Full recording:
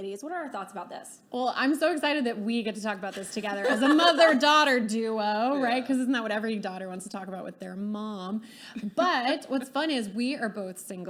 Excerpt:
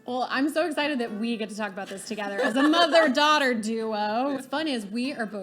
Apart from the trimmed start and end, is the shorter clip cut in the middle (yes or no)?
yes